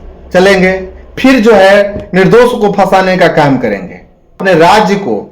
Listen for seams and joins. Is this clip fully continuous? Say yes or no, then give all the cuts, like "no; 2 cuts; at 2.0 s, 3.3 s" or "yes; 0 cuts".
no; 1 cut; at 4.4 s